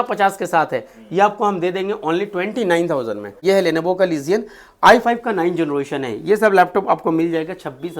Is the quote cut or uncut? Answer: cut